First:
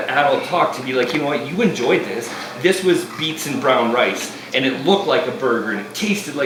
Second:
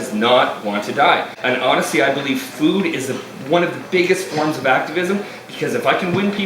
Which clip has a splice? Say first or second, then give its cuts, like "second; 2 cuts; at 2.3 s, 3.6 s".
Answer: second; 1 cut; at 1.3 s